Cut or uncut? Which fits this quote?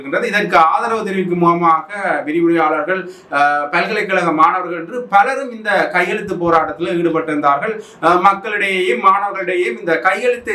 uncut